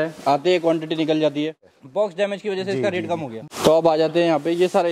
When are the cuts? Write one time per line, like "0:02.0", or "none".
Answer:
0:01.6
0:03.3